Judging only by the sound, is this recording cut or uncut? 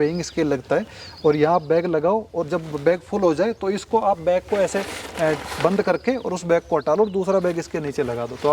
uncut